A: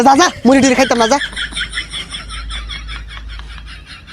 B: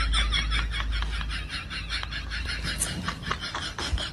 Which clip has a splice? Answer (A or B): A